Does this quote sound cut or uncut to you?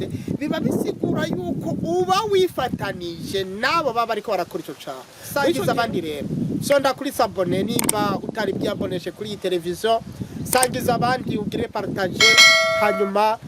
cut